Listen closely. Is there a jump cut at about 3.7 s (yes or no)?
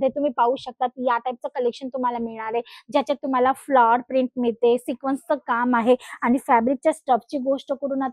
no